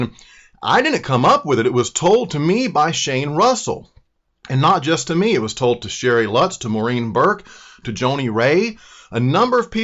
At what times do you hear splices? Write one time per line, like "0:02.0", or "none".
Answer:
0:05.3

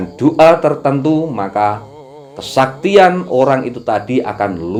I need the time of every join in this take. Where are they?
none

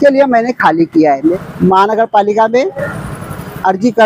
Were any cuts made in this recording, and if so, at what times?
0:01.3

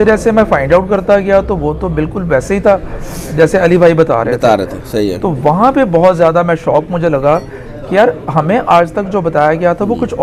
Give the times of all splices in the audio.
none

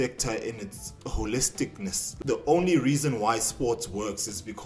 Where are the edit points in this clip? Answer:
0:02.1

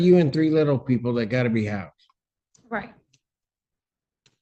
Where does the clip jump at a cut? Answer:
none

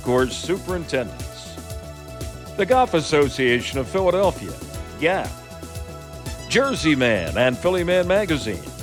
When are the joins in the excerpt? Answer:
none

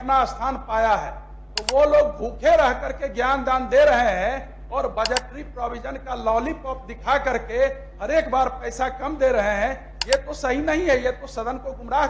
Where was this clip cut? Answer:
none

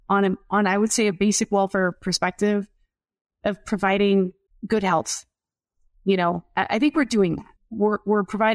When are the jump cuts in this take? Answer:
0:04.5
0:07.5

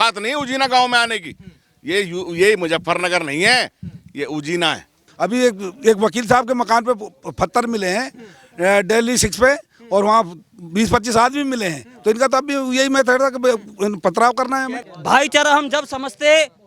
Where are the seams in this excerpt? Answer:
0:05.0
0:14.9

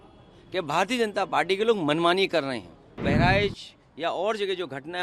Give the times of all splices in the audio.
0:03.0

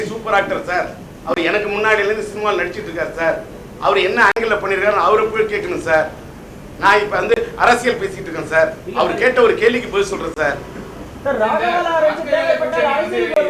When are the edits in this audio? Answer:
none

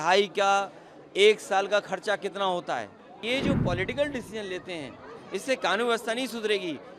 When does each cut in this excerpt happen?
0:03.2

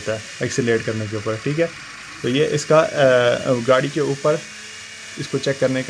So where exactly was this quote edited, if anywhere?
none

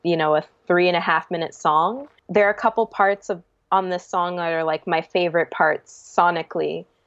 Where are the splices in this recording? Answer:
0:02.1

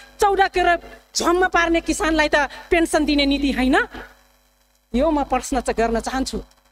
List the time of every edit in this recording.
none

